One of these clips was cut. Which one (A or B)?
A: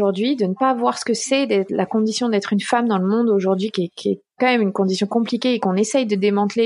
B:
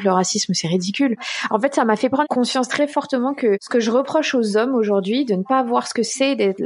B